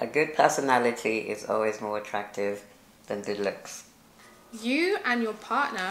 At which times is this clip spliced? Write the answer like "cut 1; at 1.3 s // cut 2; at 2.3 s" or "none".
cut 1; at 4.5 s